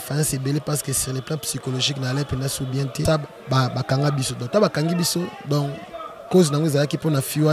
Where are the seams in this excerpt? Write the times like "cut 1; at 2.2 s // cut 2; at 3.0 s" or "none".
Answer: cut 1; at 3.0 s